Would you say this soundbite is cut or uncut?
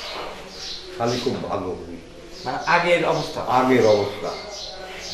uncut